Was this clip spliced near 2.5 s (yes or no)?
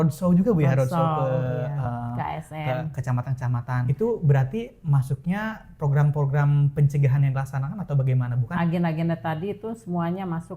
no